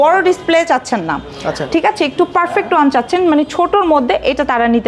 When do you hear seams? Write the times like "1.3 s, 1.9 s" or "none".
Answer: none